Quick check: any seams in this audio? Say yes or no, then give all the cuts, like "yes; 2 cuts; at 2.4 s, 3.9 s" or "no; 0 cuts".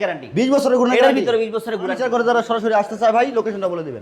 yes; 1 cut; at 2.1 s